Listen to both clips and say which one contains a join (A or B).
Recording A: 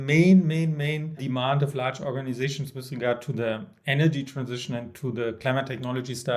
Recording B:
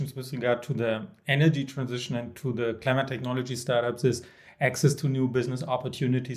A